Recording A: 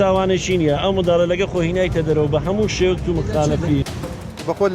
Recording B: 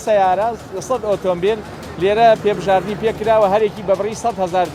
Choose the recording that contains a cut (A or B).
A